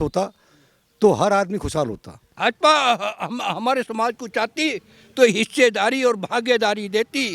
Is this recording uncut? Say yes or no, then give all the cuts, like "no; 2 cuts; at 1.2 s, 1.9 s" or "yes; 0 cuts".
no; 1 cut; at 2.3 s